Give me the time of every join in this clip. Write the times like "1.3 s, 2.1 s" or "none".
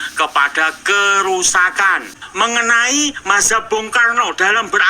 2.1 s